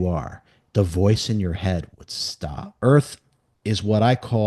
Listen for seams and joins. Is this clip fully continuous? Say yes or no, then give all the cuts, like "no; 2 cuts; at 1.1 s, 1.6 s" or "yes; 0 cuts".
no; 1 cut; at 2.8 s